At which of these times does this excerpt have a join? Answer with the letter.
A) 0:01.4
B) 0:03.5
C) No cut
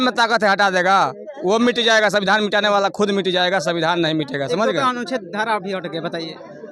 C